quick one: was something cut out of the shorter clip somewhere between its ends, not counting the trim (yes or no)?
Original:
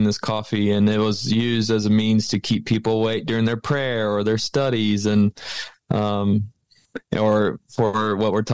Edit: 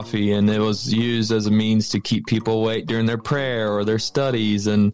no